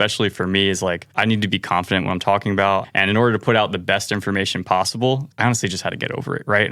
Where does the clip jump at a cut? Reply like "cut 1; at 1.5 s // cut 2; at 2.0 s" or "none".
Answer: cut 1; at 1.1 s // cut 2; at 2.9 s // cut 3; at 5.3 s